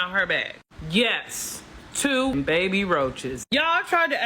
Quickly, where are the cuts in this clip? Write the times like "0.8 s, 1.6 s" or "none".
2.3 s

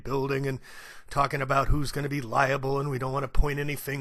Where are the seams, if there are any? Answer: none

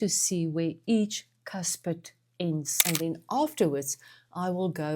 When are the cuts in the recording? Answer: 2.7 s

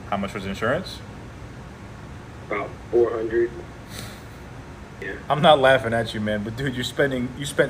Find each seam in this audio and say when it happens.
5.0 s, 6.0 s

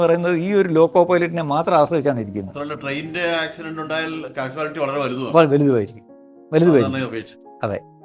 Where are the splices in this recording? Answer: none

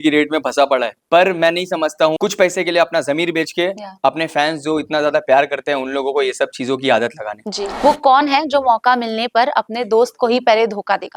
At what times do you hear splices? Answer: 1.0 s, 2.2 s, 7.6 s

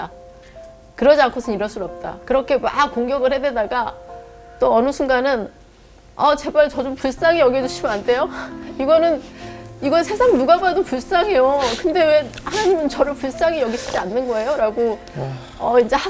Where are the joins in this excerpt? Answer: 2.2 s

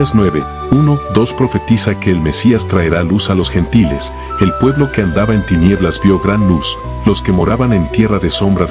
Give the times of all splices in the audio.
none

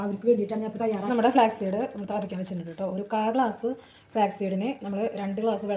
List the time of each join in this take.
1.0 s

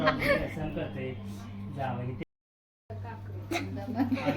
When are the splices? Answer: 2.5 s

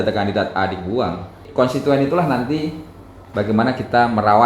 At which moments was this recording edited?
1.4 s

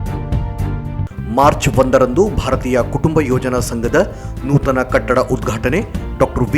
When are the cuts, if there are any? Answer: 1.0 s

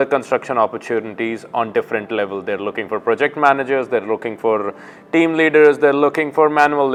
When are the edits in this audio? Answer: none

